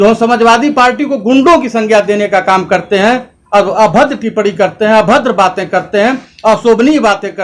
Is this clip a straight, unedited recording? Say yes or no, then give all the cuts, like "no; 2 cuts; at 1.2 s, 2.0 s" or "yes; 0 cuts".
yes; 0 cuts